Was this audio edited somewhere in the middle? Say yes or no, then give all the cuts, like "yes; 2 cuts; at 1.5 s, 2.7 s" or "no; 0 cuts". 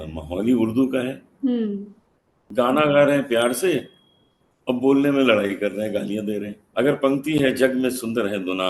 yes; 2 cuts; at 2.4 s, 6.6 s